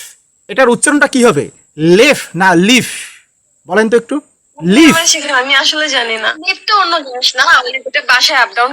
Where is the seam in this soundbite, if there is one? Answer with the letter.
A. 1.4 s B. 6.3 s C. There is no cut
B